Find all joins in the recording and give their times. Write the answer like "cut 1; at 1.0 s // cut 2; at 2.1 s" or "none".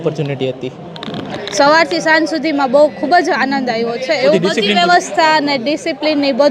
cut 1; at 1.4 s // cut 2; at 4.3 s